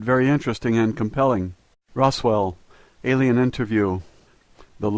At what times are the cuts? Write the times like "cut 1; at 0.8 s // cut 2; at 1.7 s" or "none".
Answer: none